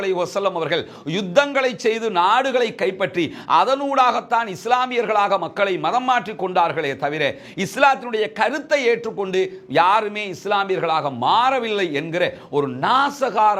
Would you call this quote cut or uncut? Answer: uncut